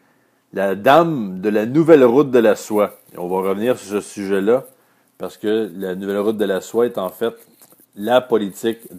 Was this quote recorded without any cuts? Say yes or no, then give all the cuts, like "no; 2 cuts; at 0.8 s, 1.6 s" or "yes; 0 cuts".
no; 1 cut; at 6.5 s